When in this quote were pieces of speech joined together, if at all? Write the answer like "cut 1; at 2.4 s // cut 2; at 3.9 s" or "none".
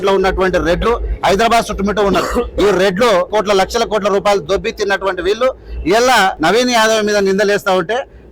cut 1; at 3.3 s // cut 2; at 4.4 s // cut 3; at 6.4 s